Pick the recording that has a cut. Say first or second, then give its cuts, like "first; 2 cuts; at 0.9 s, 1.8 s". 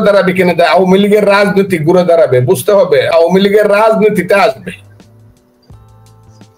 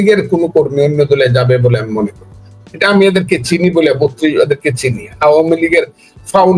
first; 1 cut; at 3.1 s